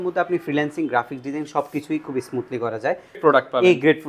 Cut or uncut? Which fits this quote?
cut